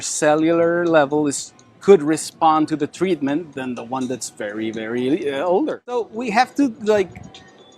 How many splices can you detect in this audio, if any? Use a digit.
1